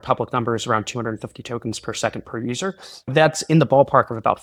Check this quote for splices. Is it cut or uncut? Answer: uncut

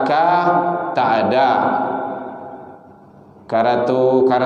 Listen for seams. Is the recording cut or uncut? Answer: uncut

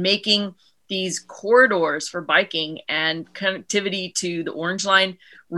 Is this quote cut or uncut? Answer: uncut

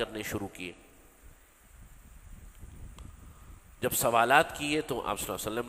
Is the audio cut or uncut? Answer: uncut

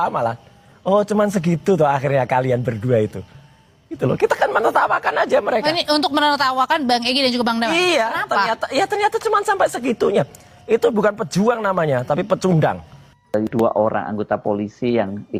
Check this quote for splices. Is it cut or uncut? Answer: uncut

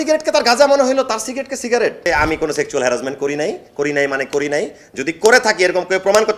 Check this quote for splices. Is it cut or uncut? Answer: cut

